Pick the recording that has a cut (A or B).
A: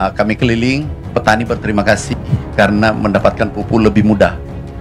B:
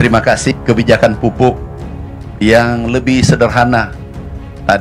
A